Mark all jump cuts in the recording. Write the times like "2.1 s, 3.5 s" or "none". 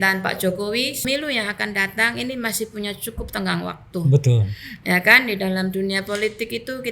1.0 s